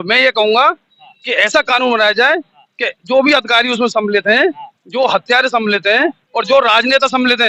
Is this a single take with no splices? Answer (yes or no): yes